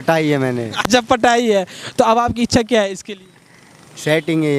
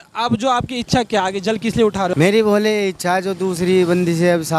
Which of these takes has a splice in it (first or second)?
second